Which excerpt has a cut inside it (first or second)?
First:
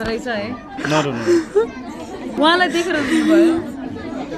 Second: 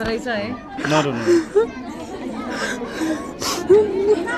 first